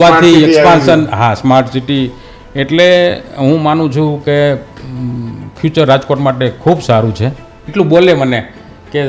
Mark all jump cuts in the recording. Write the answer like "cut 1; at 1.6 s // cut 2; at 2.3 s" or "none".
cut 1; at 7.6 s